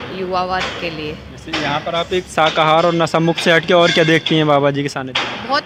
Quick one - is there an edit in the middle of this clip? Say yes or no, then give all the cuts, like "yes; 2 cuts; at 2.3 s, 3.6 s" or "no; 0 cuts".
no; 0 cuts